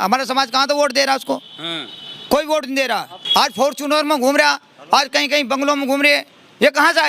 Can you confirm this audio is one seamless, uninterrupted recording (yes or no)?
no